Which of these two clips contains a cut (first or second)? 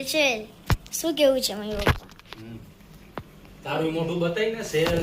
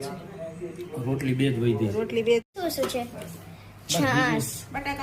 second